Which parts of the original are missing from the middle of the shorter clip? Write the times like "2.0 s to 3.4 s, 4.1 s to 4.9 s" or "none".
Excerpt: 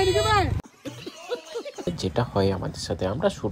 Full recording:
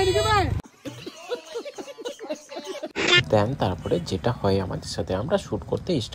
1.9 s to 4.0 s